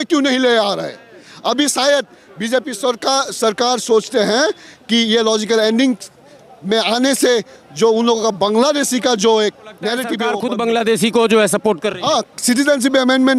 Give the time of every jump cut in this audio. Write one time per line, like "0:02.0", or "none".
0:10.2